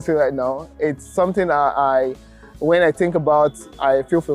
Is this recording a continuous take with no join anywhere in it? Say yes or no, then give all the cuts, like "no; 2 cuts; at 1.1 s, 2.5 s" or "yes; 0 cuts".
yes; 0 cuts